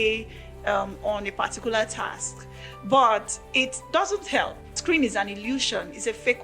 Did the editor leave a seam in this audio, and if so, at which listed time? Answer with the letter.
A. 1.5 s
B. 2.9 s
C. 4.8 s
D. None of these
C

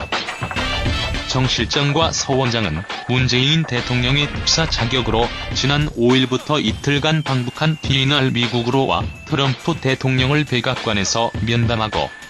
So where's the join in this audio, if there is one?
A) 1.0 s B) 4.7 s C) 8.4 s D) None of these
A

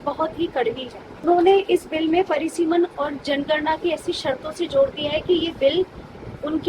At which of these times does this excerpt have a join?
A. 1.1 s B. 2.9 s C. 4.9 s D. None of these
D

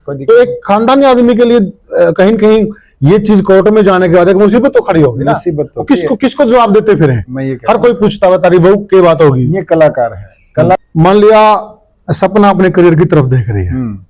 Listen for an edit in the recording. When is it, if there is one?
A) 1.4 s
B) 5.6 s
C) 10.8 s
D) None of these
C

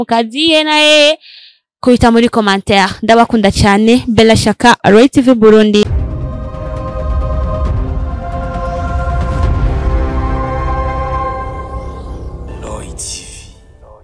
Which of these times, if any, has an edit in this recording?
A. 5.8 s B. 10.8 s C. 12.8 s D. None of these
A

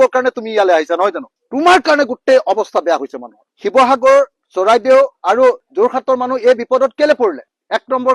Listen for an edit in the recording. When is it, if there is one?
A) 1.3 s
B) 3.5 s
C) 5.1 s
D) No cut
B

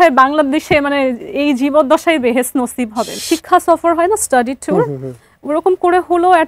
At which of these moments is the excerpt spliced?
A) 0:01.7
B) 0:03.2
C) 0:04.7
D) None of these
B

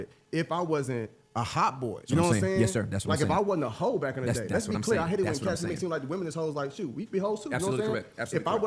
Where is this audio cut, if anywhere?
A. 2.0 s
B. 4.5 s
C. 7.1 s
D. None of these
A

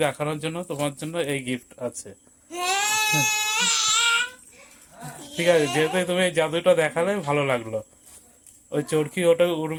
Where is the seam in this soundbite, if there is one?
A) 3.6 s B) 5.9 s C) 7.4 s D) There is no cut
D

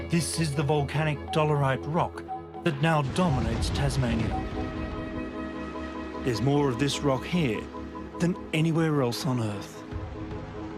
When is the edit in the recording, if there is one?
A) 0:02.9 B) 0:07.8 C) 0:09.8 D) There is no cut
A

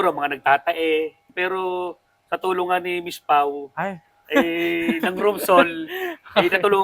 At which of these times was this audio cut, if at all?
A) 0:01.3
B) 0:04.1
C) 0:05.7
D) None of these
A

